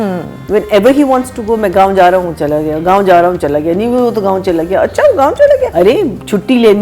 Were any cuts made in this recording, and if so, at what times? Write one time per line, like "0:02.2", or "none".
0:05.7